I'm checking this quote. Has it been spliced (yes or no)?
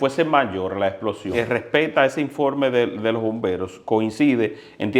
yes